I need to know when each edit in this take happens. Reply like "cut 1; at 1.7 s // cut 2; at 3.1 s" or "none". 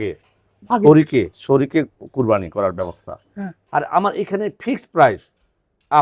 cut 1; at 3.6 s